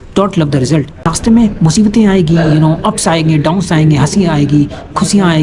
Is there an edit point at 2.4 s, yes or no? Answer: no